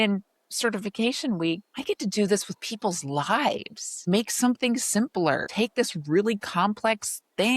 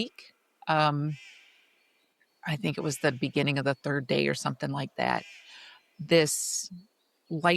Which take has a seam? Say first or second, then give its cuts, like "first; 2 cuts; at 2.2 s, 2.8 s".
first; 3 cuts; at 1.7 s, 4.1 s, 5.5 s